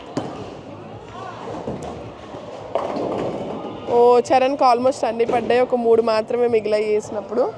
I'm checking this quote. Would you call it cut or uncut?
uncut